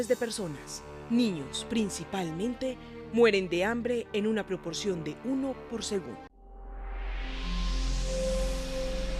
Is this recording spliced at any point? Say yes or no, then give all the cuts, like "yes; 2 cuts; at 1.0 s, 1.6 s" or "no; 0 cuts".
no; 0 cuts